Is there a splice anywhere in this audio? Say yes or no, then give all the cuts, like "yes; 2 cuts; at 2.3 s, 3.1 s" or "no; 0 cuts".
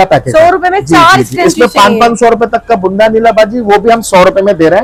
no; 0 cuts